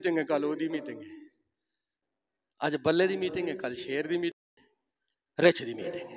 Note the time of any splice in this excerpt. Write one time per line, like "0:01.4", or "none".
none